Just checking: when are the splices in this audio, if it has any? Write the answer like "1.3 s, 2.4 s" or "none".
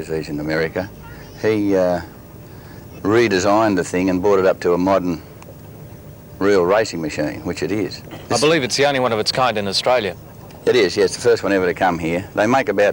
none